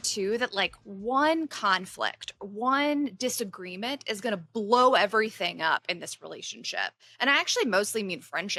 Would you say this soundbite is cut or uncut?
uncut